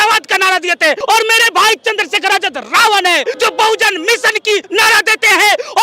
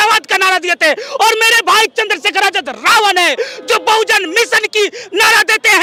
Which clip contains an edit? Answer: first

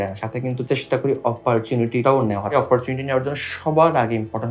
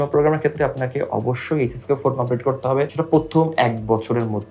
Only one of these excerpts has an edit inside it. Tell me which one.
second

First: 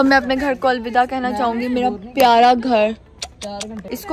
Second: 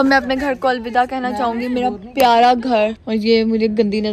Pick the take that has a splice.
second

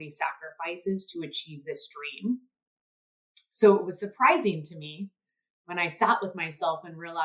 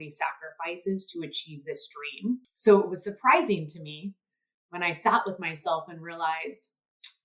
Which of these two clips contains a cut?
second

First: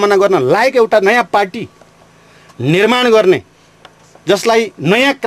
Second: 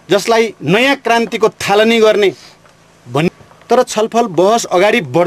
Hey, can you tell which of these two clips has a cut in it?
second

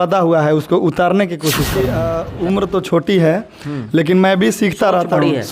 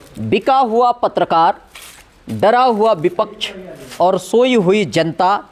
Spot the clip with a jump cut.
first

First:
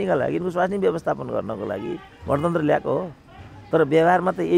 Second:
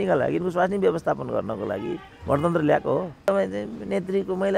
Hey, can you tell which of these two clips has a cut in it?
second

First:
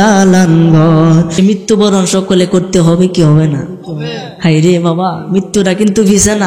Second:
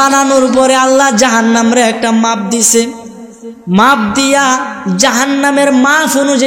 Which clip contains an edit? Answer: first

